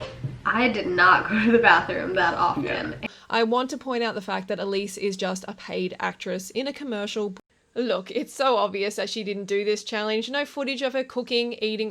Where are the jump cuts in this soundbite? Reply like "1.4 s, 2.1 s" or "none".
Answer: 3.0 s, 7.3 s